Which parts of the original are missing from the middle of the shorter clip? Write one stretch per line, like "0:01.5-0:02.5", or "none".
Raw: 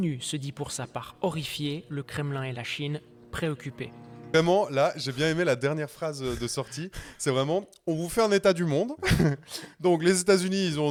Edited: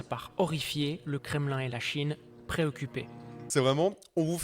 0:04.1-0:07.0

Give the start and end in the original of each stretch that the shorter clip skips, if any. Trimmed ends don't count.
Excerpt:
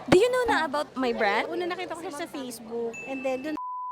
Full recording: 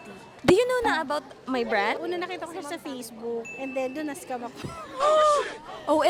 0:01.3-0:01.4

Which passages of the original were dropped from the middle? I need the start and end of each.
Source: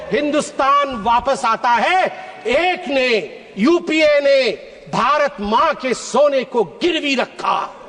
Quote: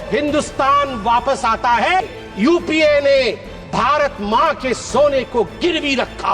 0:02.0-0:03.2

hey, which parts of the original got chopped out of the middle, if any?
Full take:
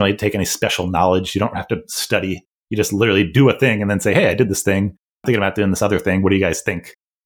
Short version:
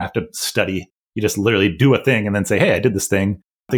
none

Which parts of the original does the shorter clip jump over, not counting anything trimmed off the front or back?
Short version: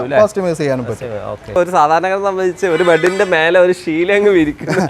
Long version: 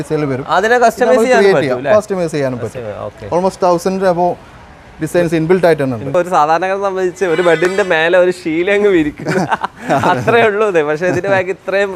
0:03.2-0:06.0

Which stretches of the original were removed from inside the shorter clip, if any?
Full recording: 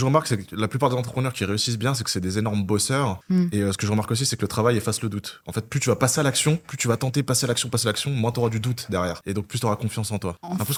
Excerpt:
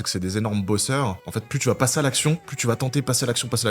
0:03.2-0:05.4

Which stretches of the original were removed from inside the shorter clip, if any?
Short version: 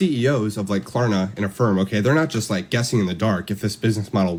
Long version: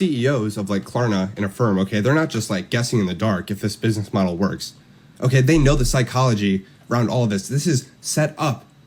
none

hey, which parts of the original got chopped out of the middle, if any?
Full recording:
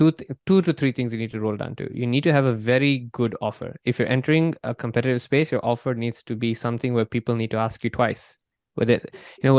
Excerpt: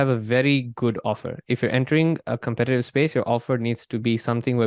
none

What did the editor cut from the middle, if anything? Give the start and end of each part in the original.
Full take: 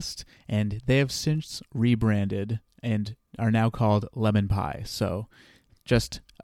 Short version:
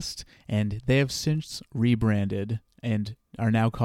none

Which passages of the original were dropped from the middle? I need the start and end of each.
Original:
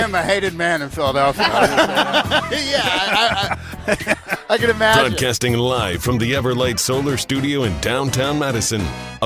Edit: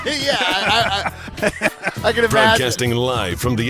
0:05.0-0:05.2

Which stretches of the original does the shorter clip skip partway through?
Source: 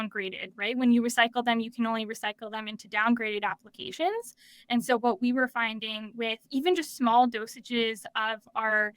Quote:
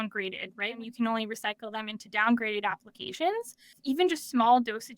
0:00.8-0:01.6
0:04.5-0:06.4

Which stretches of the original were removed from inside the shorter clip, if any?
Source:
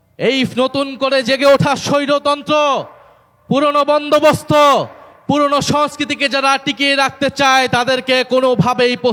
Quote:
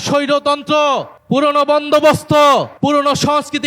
0:02.9-0:03.3
0:04.9-0:05.2

